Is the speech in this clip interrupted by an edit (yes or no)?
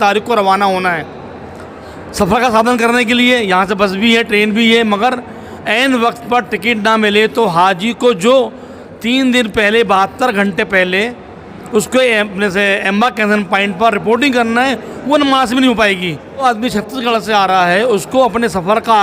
yes